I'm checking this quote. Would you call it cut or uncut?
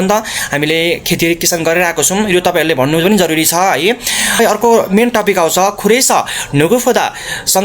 cut